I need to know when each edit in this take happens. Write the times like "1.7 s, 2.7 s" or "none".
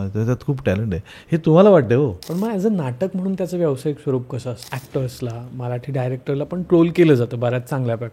2.2 s, 4.7 s